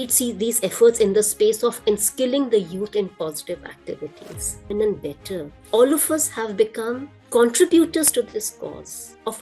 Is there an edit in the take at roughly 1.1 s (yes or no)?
no